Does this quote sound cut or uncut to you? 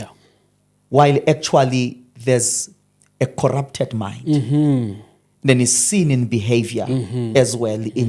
uncut